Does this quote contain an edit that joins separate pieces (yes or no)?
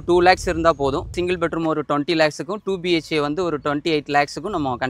yes